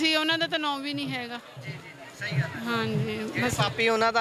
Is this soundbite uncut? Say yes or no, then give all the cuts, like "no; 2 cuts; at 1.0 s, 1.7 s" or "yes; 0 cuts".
yes; 0 cuts